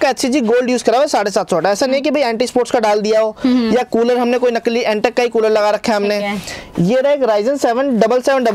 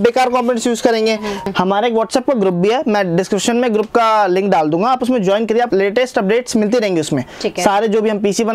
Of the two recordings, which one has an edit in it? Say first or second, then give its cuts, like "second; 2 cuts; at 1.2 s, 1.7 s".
second; 2 cuts; at 1.5 s, 5.7 s